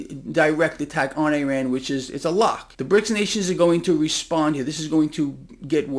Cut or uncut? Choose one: cut